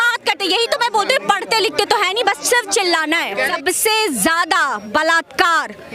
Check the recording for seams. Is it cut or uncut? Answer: cut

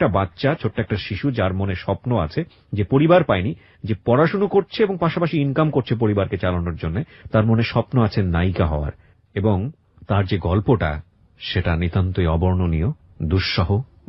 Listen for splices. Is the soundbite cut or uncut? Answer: uncut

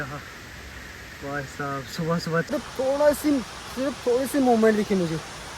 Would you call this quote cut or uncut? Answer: cut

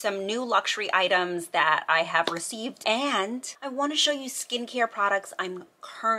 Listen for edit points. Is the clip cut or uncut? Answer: cut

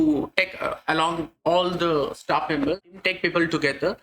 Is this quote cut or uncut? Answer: cut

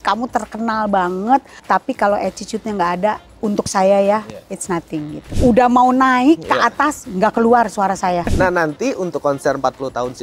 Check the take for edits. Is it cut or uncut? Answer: cut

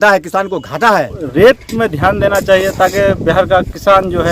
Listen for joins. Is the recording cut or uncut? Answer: cut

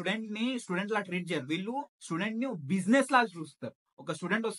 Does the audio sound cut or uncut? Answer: uncut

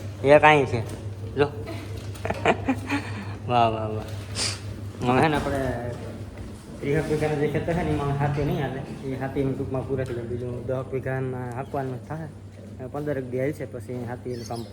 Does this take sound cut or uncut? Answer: uncut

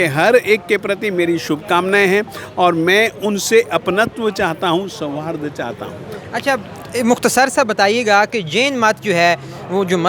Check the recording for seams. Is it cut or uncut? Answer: uncut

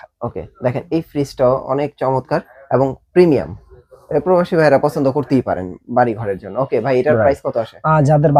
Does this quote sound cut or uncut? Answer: uncut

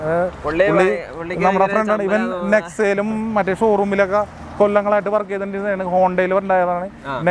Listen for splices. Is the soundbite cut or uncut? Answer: uncut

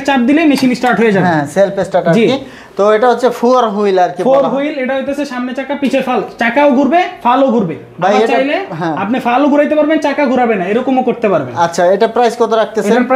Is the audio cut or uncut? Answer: uncut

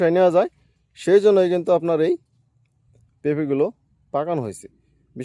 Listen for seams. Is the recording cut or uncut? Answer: uncut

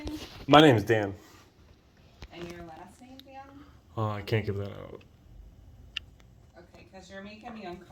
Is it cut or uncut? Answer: uncut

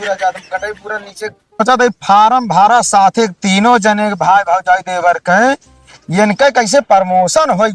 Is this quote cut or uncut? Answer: cut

